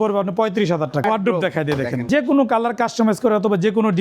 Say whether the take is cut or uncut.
cut